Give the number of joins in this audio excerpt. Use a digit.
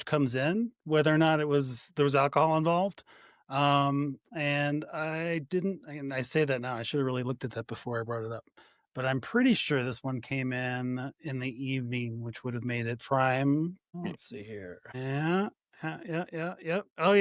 0